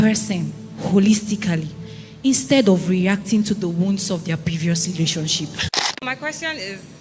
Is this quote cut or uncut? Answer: cut